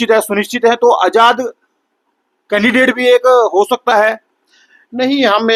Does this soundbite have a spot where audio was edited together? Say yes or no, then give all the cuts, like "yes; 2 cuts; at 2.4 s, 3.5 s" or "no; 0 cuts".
no; 0 cuts